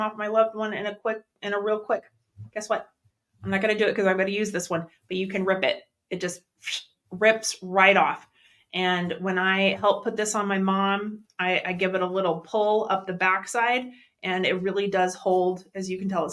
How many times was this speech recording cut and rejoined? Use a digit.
0